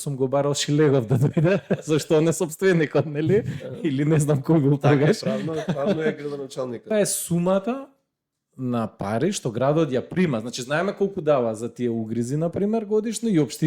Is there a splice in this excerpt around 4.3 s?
no; 1 cut; at 6.9 s

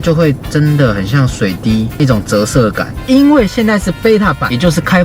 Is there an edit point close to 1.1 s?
no; 1 cut; at 3.0 s

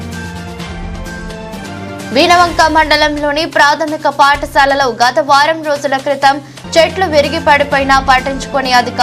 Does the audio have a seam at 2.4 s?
no; 1 cut; at 1.0 s

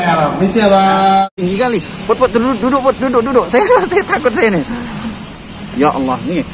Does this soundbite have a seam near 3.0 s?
no; 1 cut; at 1.3 s

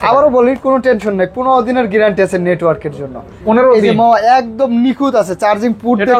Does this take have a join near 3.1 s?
no; 0 cuts

